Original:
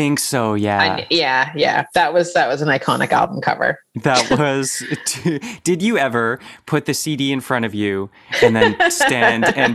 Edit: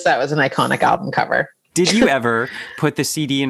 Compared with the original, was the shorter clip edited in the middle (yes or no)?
yes